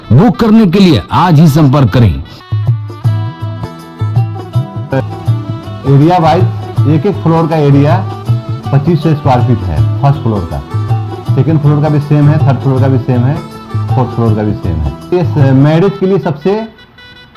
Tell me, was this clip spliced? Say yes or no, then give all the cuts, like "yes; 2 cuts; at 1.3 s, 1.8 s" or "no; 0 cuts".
no; 0 cuts